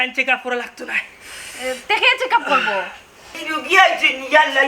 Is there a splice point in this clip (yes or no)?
yes